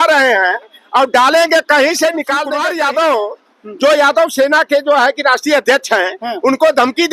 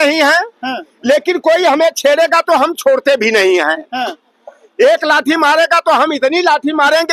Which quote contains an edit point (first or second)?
first